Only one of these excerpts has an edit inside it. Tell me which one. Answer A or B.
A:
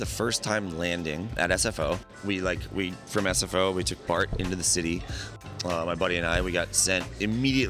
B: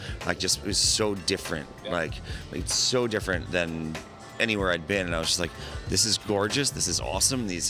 A